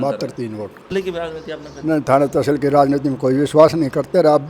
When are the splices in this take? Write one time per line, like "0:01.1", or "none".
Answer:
0:00.9